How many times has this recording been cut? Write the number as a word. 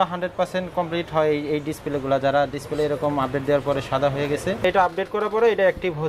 one